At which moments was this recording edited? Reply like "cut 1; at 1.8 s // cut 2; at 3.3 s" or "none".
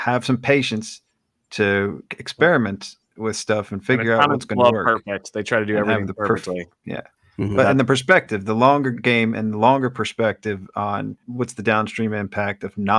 cut 1; at 11.2 s